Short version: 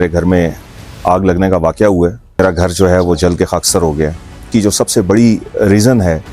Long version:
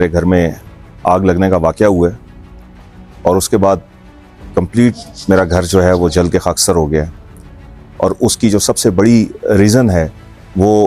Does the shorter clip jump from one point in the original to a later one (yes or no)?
yes